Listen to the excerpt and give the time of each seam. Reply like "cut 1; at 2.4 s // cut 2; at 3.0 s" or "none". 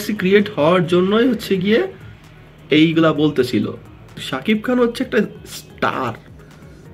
cut 1; at 4.3 s